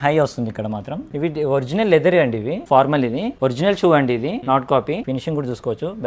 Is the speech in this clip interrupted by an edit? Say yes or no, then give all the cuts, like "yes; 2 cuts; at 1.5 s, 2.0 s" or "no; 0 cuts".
yes; 5 cuts; at 1.0 s, 2.6 s, 3.3 s, 4.4 s, 5.0 s